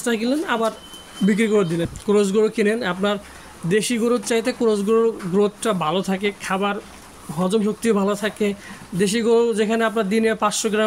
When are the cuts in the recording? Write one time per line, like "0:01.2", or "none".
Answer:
0:01.9